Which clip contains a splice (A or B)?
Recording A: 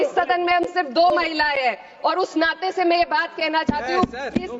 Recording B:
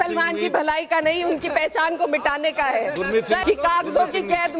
B